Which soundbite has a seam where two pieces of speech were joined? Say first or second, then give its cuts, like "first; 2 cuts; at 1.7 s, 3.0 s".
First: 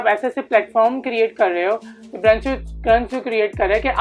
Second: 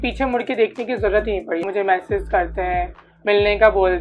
second; 1 cut; at 1.6 s